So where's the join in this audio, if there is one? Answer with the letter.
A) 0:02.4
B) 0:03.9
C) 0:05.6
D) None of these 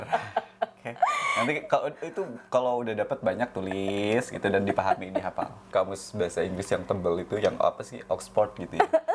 C